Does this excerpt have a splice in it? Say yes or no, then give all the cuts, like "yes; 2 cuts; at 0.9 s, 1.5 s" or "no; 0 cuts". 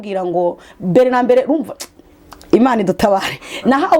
no; 0 cuts